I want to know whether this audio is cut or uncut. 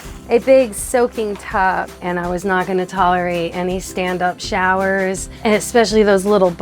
cut